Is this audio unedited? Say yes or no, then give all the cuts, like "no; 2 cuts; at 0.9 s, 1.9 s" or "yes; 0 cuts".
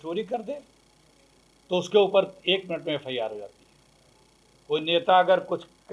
yes; 0 cuts